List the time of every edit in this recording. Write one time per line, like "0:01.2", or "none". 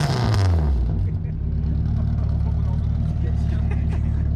none